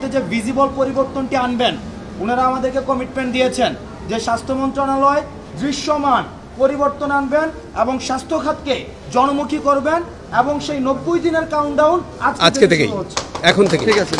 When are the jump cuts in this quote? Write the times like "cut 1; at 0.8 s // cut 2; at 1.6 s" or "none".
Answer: none